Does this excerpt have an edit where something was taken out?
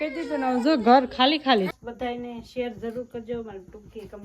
yes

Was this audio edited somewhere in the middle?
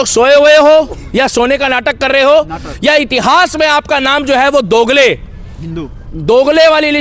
no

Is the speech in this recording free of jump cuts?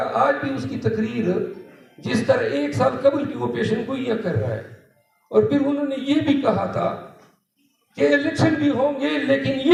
yes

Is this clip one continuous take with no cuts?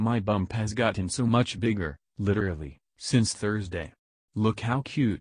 yes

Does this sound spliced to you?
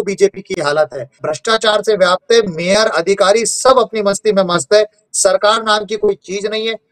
yes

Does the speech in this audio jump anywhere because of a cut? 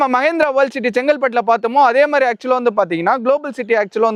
no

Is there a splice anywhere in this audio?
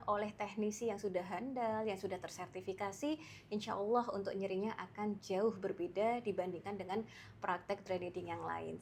no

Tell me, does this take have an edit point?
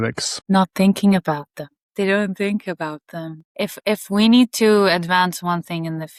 no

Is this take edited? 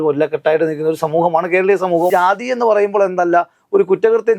yes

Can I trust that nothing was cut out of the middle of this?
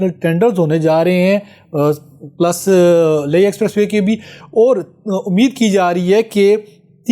yes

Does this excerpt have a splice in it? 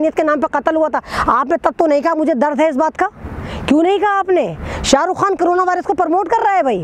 no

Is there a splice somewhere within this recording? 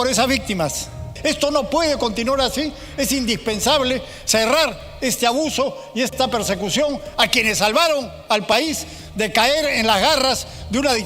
yes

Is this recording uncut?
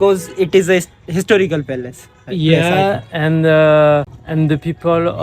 no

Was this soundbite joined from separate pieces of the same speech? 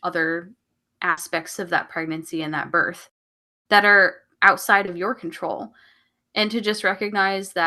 no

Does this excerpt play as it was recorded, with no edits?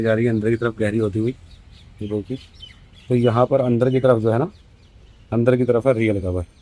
yes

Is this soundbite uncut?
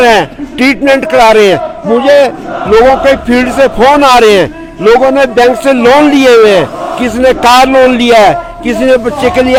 yes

